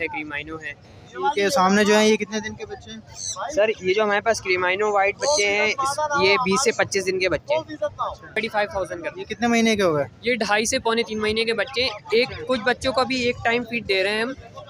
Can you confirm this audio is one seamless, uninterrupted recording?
no; 1 cut; at 8.4 s

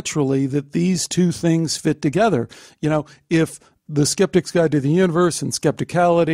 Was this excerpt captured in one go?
yes; 0 cuts

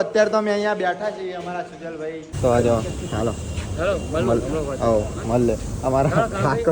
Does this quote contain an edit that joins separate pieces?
yes; 1 cut; at 2.3 s

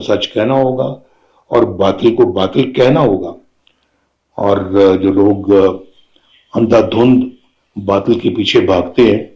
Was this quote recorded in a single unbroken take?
yes; 0 cuts

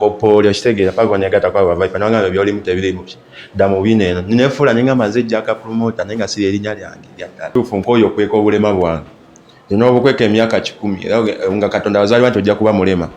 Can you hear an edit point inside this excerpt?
yes; 1 cut; at 7.4 s

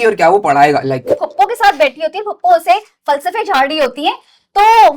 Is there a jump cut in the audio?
yes; 1 cut; at 1.1 s

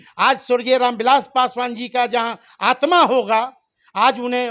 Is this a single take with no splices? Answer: yes; 0 cuts

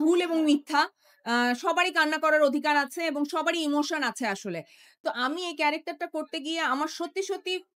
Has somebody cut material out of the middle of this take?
yes; 1 cut; at 4.9 s

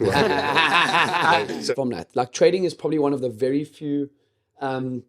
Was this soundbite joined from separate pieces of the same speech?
yes; 1 cut; at 1.7 s

